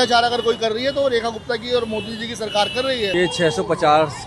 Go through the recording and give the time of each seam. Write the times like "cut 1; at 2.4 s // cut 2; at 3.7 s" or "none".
cut 1; at 3.1 s